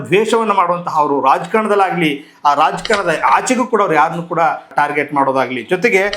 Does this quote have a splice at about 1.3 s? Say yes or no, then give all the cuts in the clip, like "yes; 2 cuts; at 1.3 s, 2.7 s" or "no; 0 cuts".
no; 1 cut; at 4.7 s